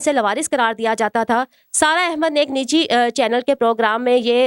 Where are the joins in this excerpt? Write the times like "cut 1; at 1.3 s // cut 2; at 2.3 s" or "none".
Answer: none